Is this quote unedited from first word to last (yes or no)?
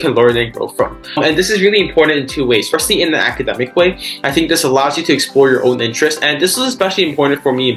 yes